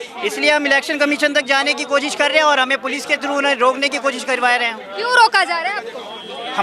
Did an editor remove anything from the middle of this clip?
no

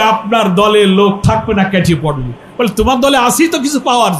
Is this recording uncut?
yes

